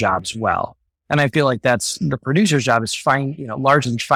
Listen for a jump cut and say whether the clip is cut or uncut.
uncut